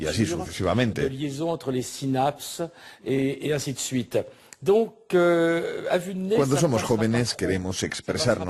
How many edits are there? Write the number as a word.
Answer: zero